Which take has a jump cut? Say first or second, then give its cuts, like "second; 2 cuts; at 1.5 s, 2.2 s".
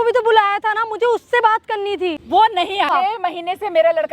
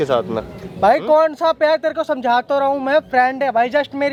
first; 2 cuts; at 2.2 s, 2.9 s